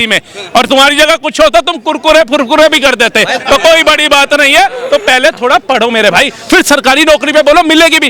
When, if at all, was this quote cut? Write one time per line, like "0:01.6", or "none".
none